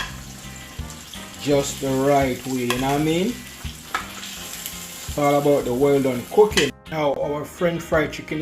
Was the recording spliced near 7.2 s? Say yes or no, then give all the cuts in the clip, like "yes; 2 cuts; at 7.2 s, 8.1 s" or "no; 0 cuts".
yes; 1 cut; at 7.2 s